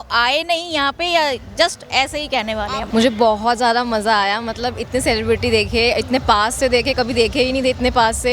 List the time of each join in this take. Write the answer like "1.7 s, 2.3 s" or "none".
2.8 s